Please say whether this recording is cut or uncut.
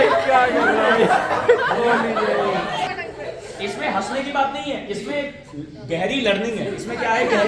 cut